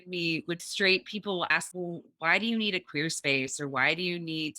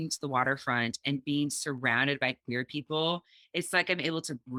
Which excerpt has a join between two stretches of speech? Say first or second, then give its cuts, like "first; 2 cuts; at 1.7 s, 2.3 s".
first; 1 cut; at 1.5 s